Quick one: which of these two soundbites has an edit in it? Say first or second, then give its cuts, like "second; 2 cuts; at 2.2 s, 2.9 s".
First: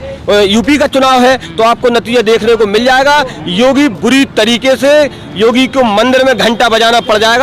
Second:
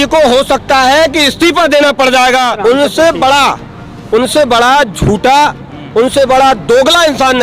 second; 1 cut; at 2.5 s